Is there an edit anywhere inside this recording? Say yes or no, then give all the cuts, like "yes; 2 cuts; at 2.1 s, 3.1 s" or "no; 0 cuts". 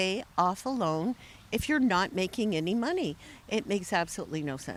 no; 0 cuts